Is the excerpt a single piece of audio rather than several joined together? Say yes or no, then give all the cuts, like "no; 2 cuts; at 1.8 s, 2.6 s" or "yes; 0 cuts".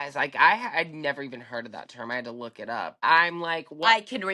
no; 1 cut; at 3.0 s